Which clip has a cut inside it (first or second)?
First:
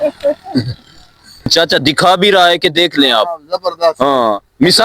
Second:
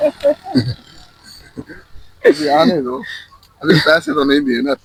first